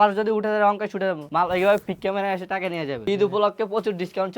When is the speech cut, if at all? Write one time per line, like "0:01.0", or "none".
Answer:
0:01.2
0:03.0

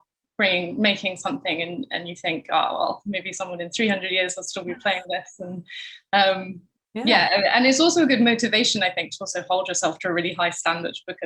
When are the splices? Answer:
none

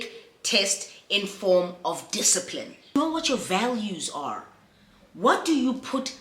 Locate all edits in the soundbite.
0:03.0

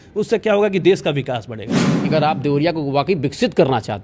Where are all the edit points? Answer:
0:02.0

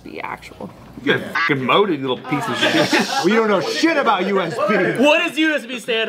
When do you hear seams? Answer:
0:04.9

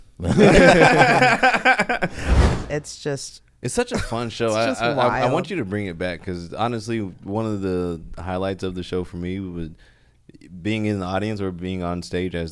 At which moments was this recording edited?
0:02.3

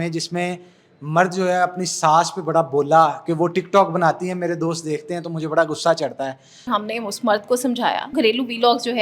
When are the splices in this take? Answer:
0:06.7
0:08.1

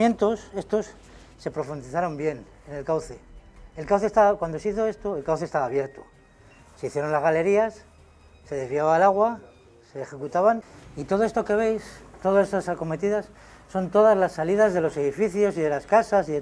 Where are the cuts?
none

